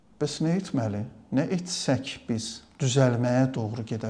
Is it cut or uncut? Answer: cut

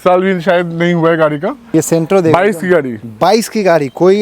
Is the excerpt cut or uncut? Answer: cut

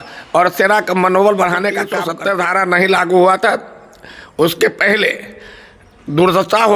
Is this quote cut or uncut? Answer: cut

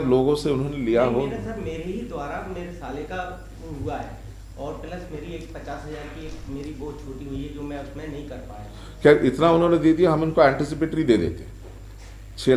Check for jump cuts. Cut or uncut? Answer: uncut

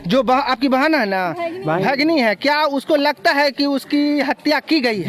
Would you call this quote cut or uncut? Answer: uncut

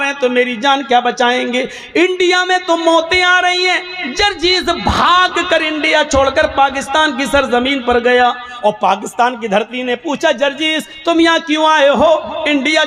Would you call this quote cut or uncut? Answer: uncut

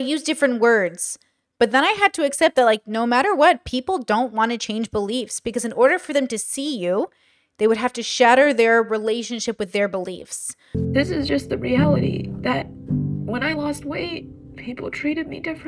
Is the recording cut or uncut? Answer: cut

